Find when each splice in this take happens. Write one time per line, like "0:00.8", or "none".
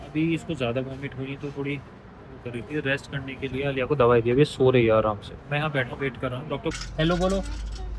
0:06.7